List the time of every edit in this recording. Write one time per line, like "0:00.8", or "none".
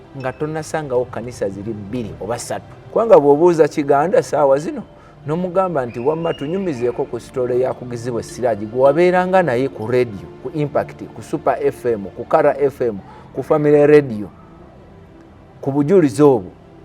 0:02.8